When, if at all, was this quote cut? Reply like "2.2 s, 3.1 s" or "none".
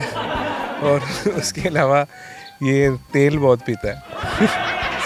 none